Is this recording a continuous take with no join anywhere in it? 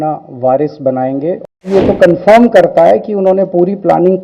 no; 1 cut; at 1.6 s

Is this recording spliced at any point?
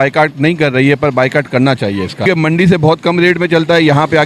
yes; 1 cut; at 2.2 s

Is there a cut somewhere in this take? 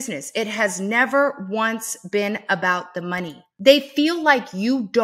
no; 0 cuts

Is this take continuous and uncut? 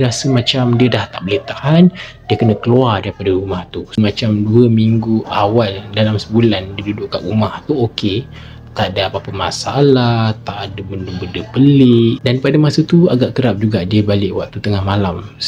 yes; 0 cuts

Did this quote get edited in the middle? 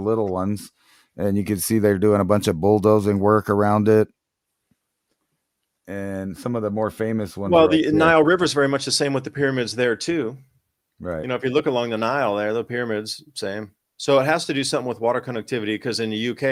no; 0 cuts

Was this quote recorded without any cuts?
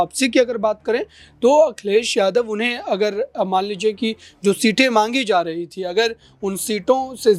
yes; 0 cuts

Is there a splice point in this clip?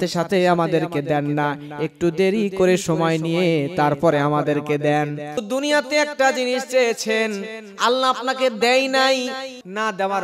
yes; 1 cut; at 5.4 s

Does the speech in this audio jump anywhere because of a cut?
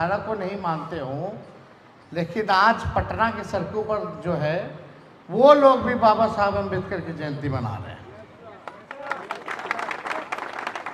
no; 0 cuts

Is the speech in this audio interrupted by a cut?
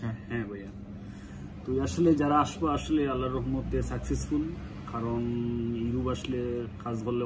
no; 0 cuts

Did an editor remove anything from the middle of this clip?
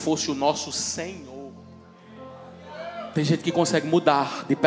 yes; 1 cut; at 3.1 s

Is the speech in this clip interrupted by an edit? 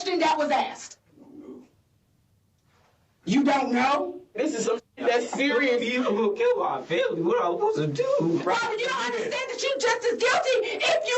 yes; 2 cuts; at 4.4 s, 8.4 s

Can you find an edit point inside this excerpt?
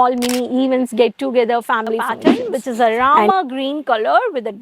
yes; 1 cut; at 2.0 s

